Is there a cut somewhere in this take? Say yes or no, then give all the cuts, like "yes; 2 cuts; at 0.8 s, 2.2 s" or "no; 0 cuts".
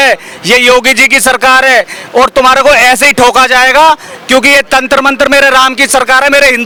no; 0 cuts